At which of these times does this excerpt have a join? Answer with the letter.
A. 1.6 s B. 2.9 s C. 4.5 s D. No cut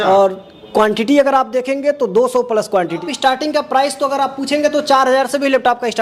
B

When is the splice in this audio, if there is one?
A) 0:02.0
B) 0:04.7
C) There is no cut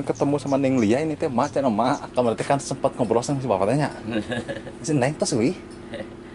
A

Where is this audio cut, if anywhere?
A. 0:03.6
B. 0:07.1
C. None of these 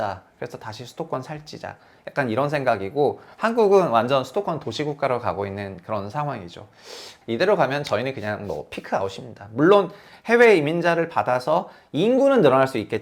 B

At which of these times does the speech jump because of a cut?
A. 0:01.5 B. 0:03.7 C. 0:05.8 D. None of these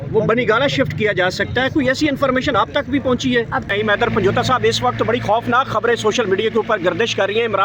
B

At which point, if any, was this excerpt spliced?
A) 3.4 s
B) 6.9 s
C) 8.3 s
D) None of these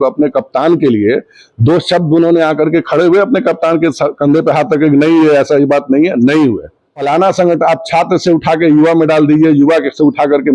B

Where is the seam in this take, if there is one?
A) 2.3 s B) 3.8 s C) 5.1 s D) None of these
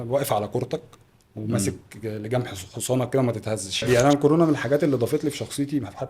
B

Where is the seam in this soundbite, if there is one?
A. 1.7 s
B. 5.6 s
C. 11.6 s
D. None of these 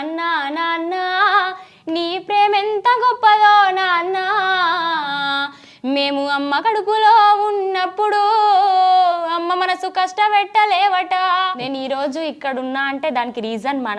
C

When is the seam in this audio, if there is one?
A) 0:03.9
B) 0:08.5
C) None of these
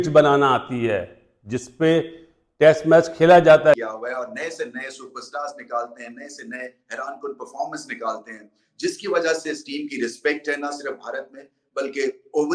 A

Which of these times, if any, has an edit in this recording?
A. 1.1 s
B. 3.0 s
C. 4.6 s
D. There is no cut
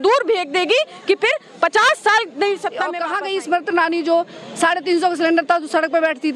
B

